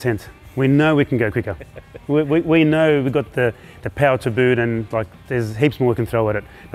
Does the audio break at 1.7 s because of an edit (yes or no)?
no